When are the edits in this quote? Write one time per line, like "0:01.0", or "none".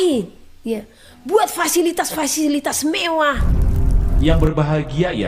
0:03.4

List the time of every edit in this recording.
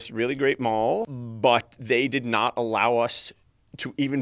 0:01.1

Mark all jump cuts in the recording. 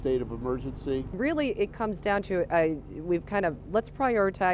none

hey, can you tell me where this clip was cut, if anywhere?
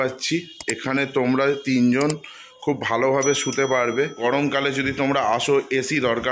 0:04.1

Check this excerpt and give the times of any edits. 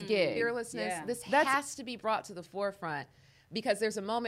0:01.5

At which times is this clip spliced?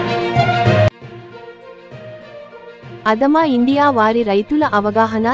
none

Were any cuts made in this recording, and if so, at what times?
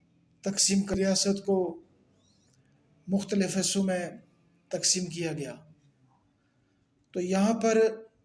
0:01.0

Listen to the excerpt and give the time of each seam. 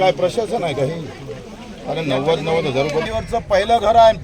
0:03.1

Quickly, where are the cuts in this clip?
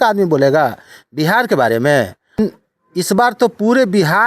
0:02.4

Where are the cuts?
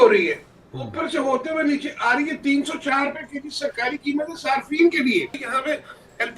0:05.5

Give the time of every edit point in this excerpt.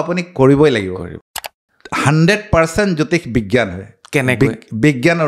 0:01.3

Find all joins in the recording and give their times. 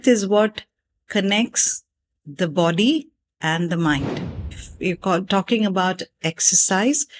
0:04.7

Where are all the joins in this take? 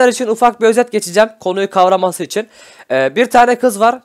none

